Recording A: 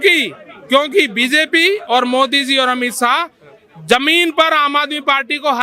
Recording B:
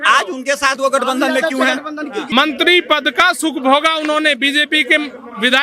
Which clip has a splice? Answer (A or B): B